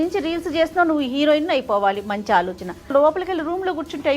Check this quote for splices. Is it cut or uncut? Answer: cut